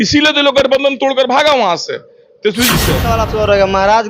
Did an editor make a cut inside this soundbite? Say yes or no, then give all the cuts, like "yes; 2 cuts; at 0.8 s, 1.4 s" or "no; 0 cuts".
yes; 1 cut; at 3.0 s